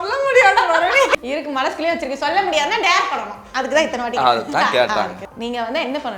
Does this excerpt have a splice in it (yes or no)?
yes